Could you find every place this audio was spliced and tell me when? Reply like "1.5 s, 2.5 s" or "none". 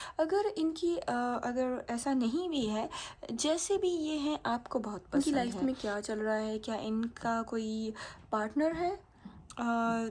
5.1 s